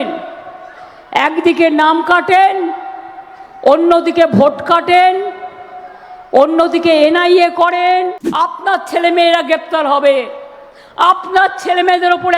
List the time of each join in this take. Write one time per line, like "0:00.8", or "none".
0:08.2